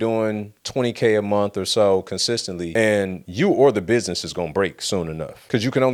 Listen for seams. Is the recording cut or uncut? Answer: uncut